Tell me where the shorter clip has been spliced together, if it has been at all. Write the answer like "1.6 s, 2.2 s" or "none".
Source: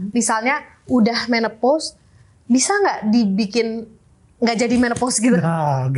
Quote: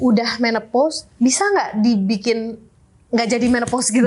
1.0 s